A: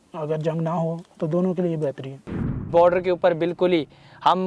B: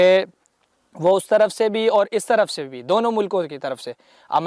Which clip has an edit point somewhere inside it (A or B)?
A